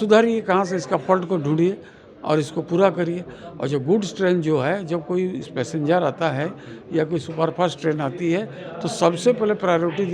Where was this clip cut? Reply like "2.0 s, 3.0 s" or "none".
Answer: none